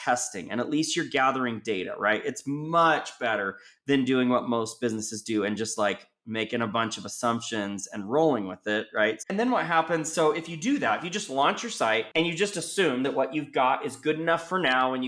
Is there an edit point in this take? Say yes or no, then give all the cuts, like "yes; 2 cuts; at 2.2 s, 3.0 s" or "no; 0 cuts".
yes; 2 cuts; at 9.2 s, 12.1 s